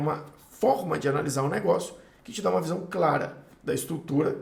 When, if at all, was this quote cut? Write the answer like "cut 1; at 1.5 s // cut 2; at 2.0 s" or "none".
none